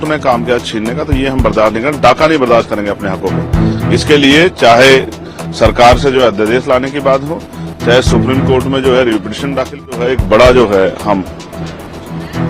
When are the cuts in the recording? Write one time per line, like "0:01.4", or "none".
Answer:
0:10.0